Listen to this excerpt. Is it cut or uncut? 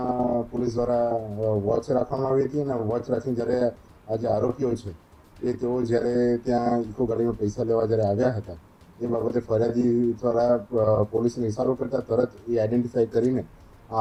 uncut